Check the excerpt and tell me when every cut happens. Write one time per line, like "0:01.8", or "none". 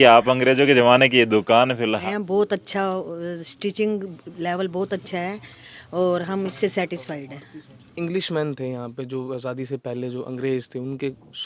0:02.0
0:07.9